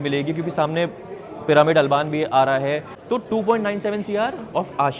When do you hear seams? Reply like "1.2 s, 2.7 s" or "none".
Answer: 2.9 s